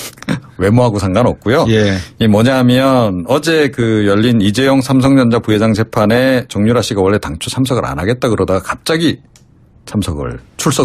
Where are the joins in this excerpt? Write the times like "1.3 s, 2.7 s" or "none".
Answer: 6.8 s